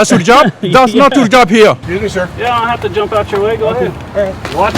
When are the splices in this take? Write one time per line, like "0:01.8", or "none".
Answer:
0:01.8